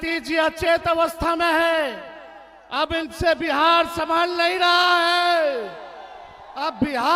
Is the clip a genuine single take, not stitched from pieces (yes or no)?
yes